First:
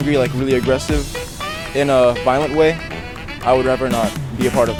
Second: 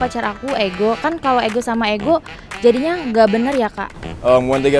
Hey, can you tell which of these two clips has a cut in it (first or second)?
second